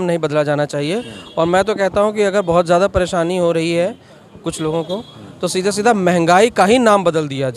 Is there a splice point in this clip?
no; 0 cuts

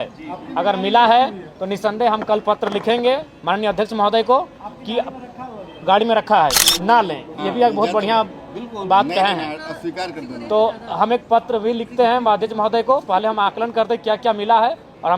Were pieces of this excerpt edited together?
yes; 1 cut; at 6.7 s

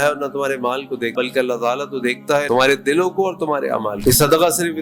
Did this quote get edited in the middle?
yes; 3 cuts; at 1.1 s, 2.5 s, 4.0 s

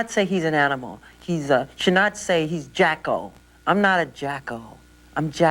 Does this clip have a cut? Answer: no; 0 cuts

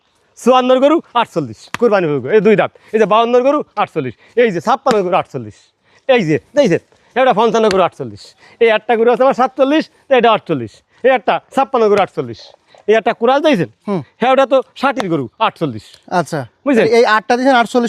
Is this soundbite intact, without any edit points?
yes; 0 cuts

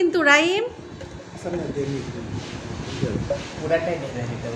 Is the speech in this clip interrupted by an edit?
no; 0 cuts

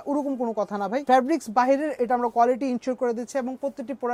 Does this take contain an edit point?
no; 0 cuts

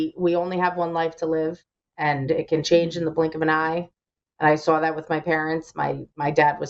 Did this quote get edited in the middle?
no; 0 cuts

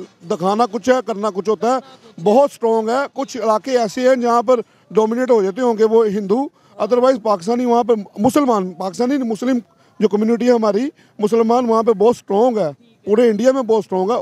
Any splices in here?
no; 0 cuts

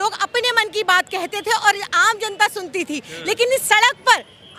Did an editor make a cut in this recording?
no; 0 cuts

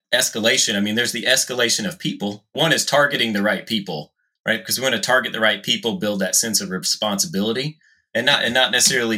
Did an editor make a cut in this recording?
no; 0 cuts

